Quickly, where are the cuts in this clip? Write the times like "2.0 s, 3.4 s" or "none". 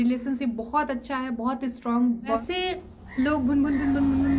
2.4 s